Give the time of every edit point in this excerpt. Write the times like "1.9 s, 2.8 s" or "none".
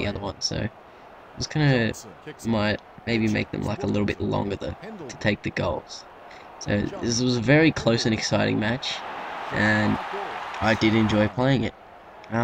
9.7 s